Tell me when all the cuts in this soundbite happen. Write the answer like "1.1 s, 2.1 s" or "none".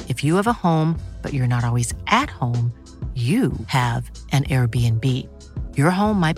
none